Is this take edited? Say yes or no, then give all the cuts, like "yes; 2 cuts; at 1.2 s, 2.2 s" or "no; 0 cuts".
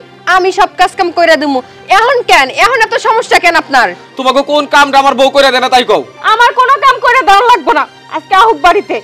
yes; 1 cut; at 6.2 s